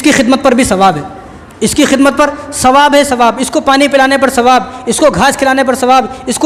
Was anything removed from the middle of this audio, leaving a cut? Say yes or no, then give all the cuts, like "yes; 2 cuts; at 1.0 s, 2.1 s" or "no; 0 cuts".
no; 0 cuts